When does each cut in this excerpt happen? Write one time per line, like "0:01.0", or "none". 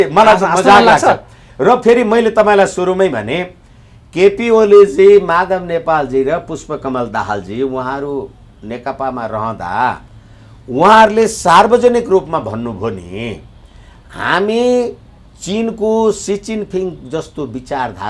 none